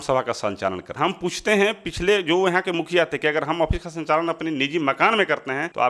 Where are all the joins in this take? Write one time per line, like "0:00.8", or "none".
0:00.9